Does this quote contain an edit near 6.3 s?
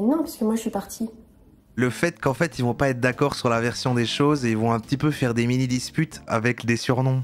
yes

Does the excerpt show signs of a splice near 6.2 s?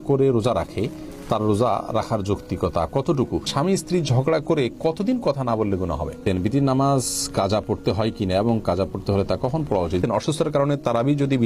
yes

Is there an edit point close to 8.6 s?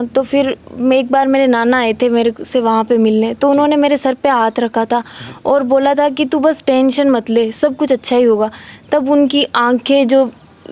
no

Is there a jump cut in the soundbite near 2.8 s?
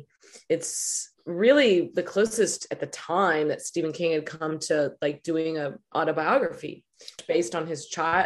no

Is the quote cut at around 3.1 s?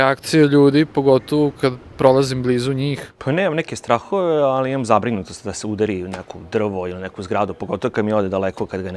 yes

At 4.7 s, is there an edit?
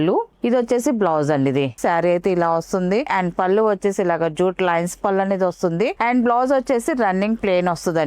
no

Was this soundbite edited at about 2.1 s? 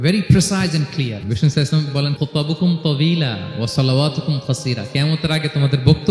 yes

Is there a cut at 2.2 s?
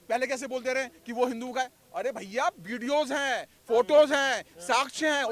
no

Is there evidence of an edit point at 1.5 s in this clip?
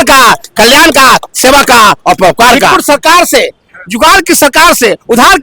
no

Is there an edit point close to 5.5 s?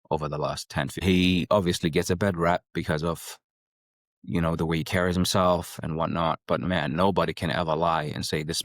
no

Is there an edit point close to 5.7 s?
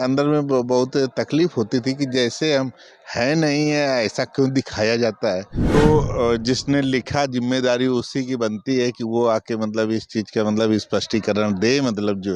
yes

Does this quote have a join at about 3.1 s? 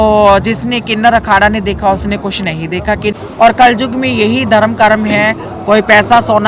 yes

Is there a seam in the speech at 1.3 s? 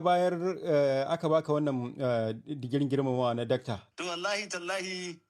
no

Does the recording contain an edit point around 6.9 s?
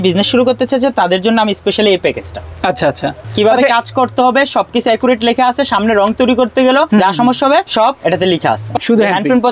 yes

